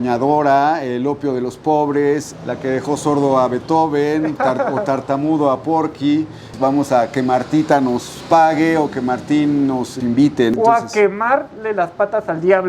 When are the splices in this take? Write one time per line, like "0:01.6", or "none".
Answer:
0:02.3
0:06.4
0:10.5